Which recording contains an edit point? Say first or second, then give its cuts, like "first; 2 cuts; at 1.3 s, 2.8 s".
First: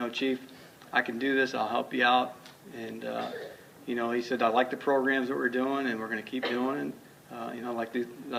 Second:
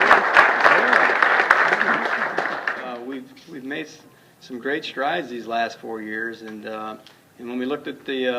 second; 1 cut; at 3.0 s